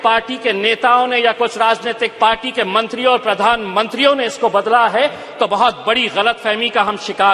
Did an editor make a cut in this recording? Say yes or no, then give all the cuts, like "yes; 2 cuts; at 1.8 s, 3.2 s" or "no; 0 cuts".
no; 0 cuts